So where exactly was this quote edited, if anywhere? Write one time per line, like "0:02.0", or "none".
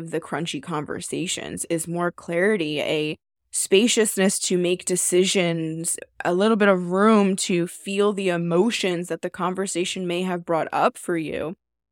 0:01.6
0:06.0